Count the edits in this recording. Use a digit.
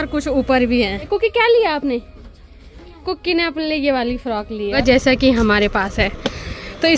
2